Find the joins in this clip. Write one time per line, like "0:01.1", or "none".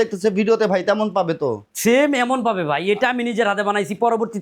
none